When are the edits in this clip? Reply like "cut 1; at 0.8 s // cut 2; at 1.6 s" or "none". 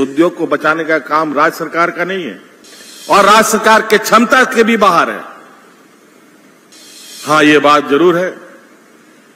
cut 1; at 6.7 s